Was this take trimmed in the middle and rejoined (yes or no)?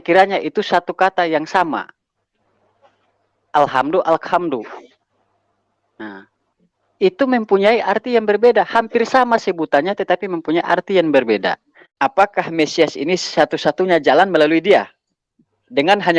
yes